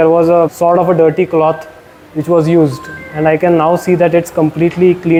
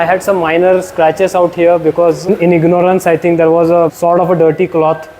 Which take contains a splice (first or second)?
second